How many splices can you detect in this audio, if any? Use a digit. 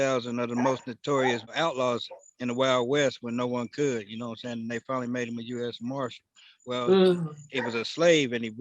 1